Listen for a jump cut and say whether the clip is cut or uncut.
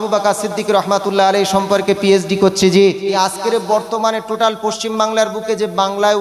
cut